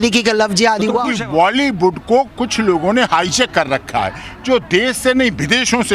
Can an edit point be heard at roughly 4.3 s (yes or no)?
no